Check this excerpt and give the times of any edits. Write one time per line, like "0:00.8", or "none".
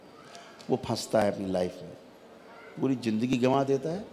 none